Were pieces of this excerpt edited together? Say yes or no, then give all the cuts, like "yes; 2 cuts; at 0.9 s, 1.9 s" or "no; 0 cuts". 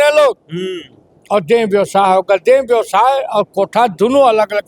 no; 0 cuts